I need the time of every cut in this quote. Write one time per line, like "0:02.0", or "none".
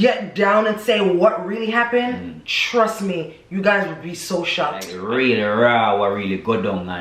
0:04.9